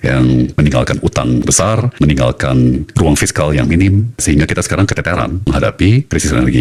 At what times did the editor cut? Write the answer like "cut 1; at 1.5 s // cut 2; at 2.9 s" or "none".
none